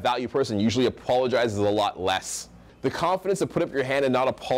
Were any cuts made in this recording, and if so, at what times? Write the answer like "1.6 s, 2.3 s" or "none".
2.7 s